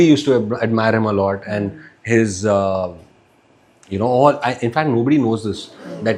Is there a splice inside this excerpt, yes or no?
no